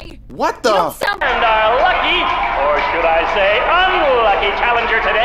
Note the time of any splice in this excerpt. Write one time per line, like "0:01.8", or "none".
0:01.2